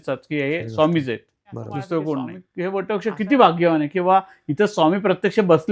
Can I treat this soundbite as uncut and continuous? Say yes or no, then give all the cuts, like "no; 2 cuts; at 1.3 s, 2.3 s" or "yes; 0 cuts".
no; 1 cut; at 2.4 s